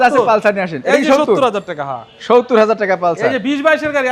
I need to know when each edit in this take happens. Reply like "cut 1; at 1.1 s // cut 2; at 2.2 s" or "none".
none